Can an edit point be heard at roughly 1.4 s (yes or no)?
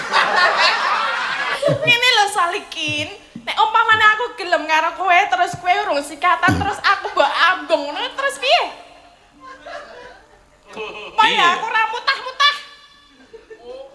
yes